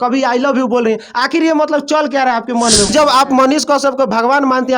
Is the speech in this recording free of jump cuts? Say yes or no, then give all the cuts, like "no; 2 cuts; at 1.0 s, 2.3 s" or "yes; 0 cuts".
no; 1 cut; at 2.9 s